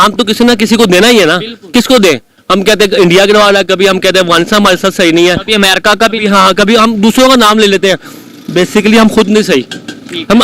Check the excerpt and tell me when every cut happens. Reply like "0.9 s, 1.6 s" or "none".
none